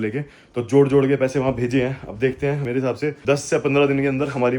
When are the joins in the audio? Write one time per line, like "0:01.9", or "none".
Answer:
0:02.8